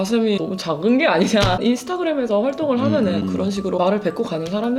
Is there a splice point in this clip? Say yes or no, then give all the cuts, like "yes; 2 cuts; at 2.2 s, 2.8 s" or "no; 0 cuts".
no; 0 cuts